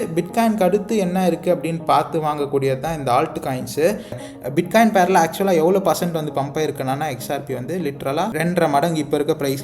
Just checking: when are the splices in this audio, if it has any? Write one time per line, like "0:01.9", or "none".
0:04.2
0:08.3

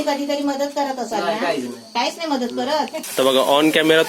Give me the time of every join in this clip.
0:03.0

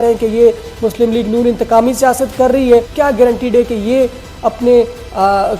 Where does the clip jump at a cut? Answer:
0:02.9

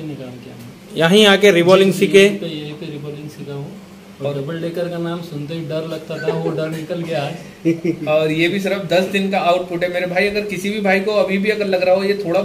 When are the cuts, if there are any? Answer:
none

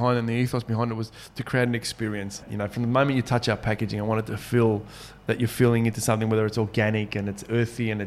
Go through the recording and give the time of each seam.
0:02.5

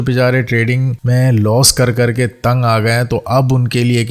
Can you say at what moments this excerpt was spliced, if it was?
0:00.9

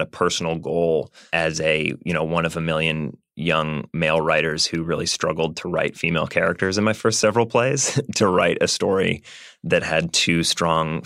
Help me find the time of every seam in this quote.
0:01.2

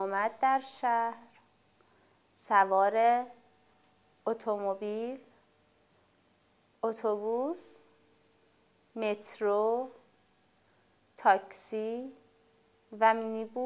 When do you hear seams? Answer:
none

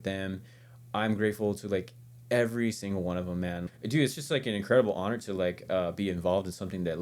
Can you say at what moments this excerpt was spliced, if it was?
0:03.7

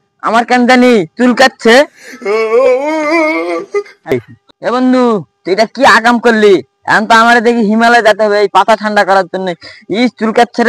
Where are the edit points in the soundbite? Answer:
0:04.1

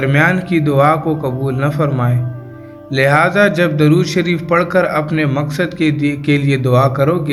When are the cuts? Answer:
none

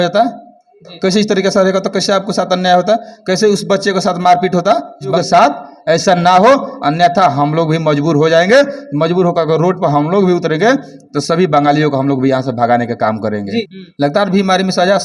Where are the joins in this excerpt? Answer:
0:05.2
0:13.8

